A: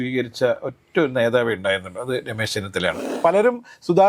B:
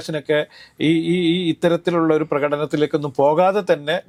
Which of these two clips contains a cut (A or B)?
A